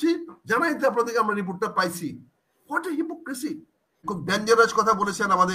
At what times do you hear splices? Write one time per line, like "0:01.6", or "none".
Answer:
0:04.1